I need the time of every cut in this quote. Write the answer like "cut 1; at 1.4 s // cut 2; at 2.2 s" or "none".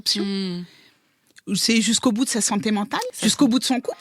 cut 1; at 3.1 s